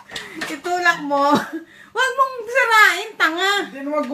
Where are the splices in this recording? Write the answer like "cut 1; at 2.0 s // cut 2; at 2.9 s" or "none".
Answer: cut 1; at 1.0 s